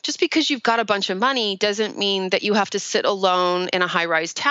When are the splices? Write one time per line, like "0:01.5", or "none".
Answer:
none